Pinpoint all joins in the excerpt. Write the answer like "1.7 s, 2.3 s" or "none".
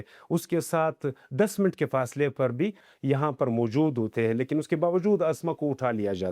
2.9 s